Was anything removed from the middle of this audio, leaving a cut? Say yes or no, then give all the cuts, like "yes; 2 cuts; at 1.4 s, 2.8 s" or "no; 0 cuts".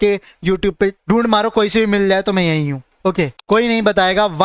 yes; 2 cuts; at 1.0 s, 3.4 s